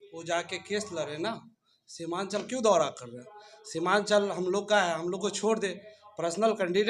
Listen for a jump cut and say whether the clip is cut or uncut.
uncut